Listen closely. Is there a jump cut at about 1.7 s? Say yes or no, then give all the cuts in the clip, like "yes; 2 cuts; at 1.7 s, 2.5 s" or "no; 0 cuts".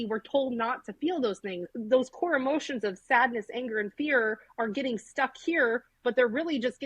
yes; 1 cut; at 1.7 s